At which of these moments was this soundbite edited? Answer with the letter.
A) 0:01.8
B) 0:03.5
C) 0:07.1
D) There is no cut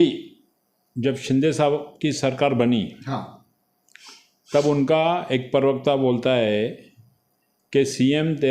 C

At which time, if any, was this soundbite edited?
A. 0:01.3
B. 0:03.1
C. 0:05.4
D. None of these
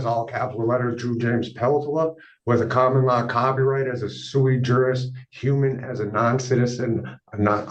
D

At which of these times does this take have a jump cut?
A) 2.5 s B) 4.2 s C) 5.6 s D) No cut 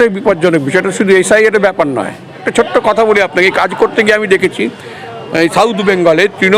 A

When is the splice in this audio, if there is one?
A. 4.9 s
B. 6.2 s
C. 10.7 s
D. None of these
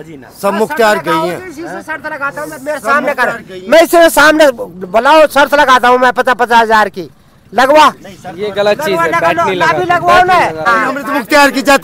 C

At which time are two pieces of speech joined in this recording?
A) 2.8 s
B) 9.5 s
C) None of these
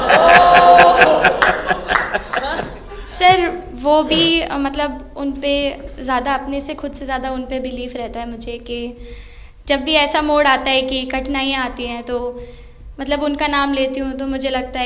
C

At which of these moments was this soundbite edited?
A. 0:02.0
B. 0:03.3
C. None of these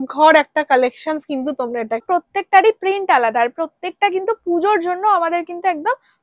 A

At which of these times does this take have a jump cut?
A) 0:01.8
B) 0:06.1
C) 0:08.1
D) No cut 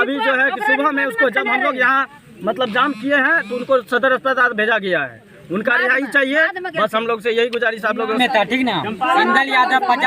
C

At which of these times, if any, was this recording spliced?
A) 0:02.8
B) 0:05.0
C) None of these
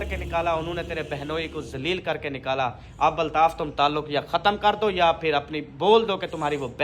C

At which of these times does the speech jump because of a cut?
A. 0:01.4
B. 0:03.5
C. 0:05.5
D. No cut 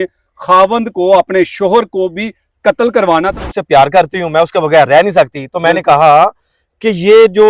B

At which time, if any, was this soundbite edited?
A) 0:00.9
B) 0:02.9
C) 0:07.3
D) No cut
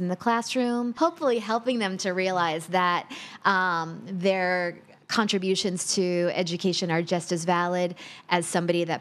A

